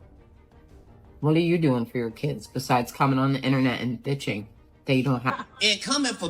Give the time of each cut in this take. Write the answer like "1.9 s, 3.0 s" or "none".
5.3 s